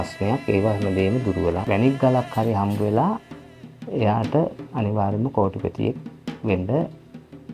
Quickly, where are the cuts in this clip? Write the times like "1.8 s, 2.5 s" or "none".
1.6 s